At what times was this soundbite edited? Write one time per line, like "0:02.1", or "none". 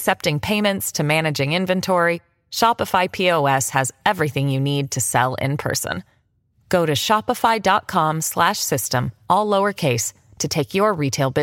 none